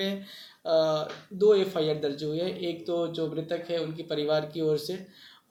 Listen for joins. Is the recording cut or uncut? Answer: uncut